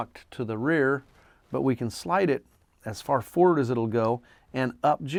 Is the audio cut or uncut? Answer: uncut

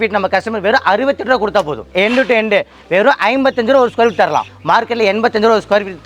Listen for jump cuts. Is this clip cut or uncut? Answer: cut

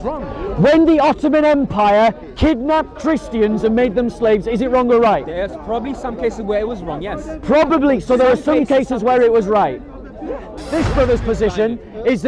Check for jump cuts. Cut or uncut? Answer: cut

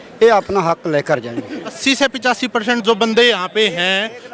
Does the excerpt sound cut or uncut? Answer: cut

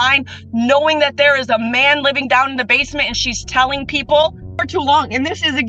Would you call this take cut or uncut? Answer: cut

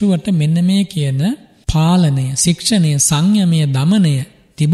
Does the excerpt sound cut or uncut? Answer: cut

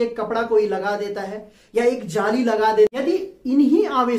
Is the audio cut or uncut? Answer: cut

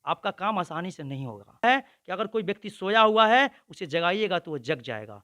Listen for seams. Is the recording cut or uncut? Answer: cut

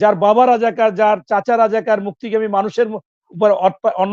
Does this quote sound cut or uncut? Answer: uncut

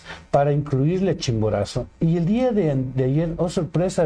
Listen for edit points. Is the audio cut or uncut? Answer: uncut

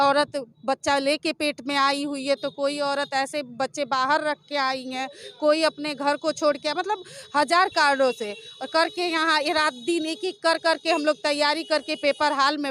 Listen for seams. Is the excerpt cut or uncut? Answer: uncut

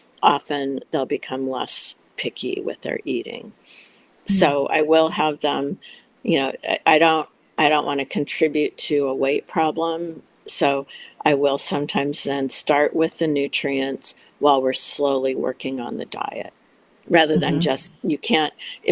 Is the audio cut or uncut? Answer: uncut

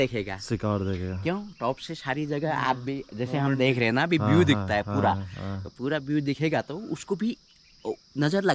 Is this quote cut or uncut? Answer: uncut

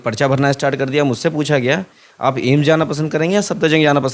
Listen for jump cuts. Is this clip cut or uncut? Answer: uncut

